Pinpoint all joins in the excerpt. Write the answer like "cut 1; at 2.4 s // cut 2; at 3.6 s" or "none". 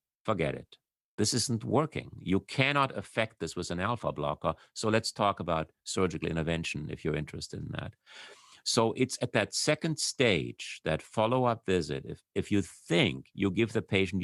none